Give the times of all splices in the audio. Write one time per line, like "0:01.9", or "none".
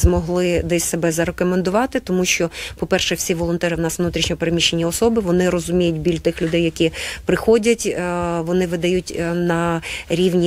none